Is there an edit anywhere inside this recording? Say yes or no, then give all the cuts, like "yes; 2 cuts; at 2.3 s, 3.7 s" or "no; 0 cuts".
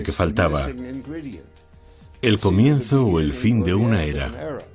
no; 0 cuts